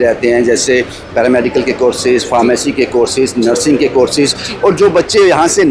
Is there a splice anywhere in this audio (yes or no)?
no